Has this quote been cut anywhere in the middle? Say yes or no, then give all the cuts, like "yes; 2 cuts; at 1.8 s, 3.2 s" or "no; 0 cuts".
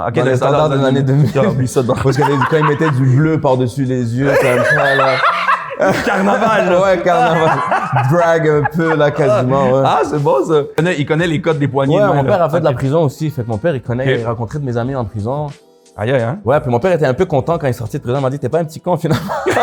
yes; 1 cut; at 10.8 s